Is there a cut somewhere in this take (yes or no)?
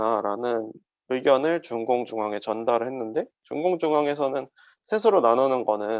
no